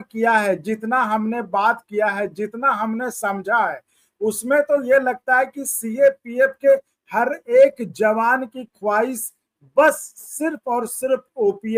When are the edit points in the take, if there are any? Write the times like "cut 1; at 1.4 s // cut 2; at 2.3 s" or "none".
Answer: none

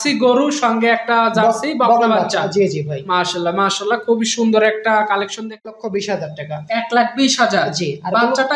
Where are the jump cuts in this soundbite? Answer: cut 1; at 5.6 s

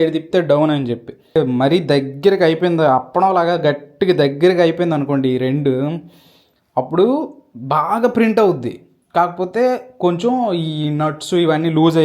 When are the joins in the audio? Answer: cut 1; at 1.4 s

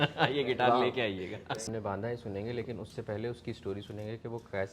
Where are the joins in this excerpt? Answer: cut 1; at 1.6 s

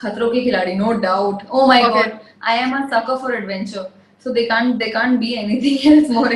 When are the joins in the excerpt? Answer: none

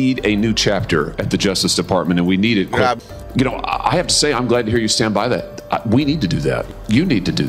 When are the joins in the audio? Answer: cut 1; at 3.0 s // cut 2; at 6.7 s

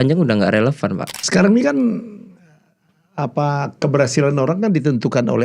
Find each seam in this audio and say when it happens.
cut 1; at 1.1 s

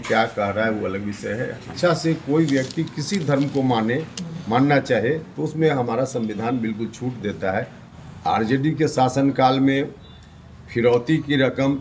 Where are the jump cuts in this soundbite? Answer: cut 1; at 1.7 s // cut 2; at 7.8 s

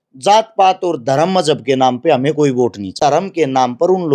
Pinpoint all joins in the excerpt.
cut 1; at 2.8 s

